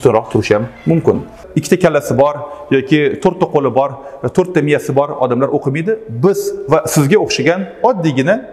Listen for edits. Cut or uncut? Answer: cut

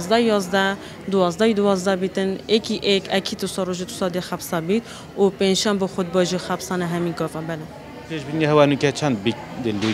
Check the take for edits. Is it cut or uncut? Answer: uncut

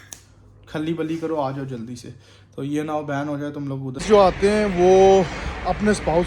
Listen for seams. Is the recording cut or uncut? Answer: cut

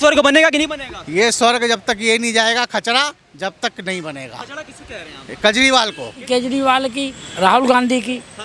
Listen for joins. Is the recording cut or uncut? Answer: cut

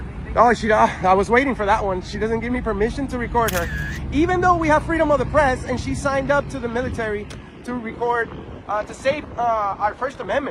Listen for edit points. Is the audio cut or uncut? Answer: uncut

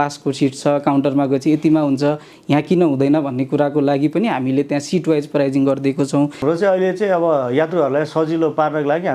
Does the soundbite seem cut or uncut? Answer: cut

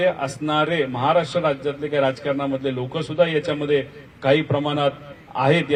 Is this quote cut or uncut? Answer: uncut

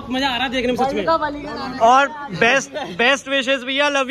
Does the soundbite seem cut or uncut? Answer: uncut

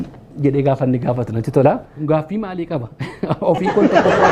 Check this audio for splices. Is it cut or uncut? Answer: cut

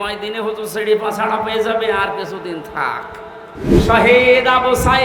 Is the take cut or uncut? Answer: cut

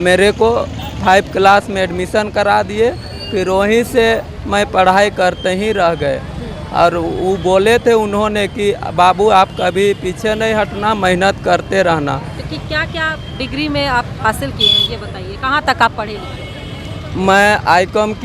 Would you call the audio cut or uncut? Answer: uncut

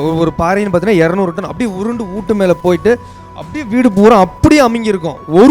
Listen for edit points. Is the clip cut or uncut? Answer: uncut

